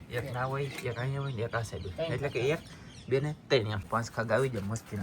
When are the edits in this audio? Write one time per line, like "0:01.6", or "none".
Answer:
0:03.8

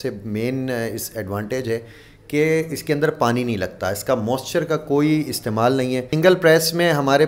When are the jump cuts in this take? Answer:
0:06.1

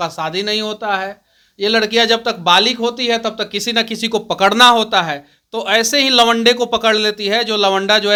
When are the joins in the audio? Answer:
none

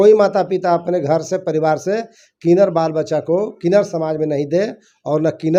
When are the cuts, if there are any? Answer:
none

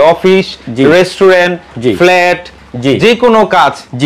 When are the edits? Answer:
none

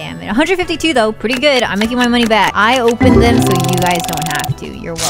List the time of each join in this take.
0:02.5

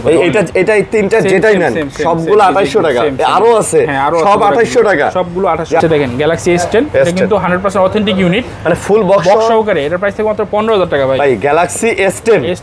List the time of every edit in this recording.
0:05.8

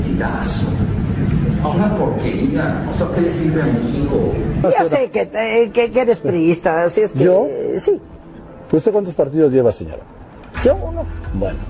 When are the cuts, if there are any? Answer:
0:04.6

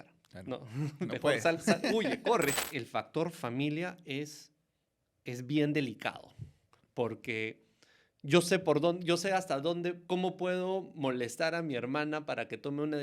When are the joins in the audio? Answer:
0:02.6

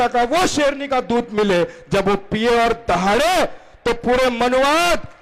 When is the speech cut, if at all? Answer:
none

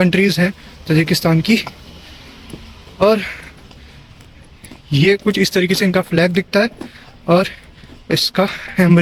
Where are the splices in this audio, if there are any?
none

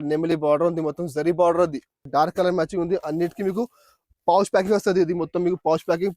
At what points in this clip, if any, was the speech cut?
0:01.9

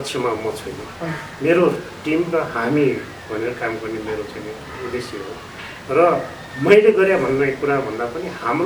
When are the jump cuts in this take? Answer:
none

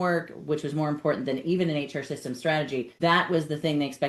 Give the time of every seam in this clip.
0:02.9

